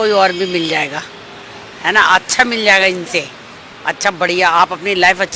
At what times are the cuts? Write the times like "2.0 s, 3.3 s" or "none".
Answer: none